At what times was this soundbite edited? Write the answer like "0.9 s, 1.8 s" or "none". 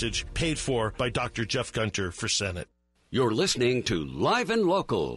2.7 s